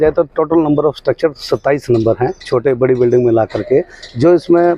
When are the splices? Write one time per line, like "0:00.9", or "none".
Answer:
none